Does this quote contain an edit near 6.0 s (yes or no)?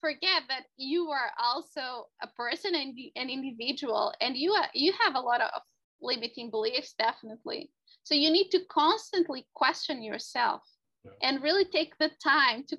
no